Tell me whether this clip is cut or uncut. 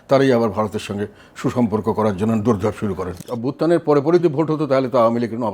cut